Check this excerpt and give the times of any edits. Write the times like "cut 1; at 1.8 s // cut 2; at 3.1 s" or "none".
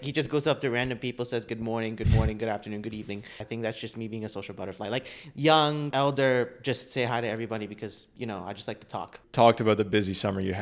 cut 1; at 3.4 s // cut 2; at 5.9 s // cut 3; at 9.2 s